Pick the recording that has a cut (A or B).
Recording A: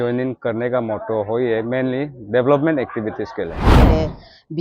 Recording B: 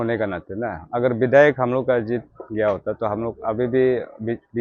A